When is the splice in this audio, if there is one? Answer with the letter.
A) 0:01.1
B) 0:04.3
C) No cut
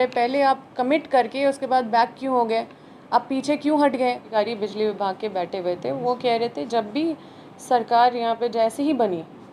B